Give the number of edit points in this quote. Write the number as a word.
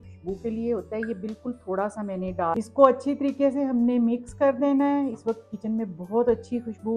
one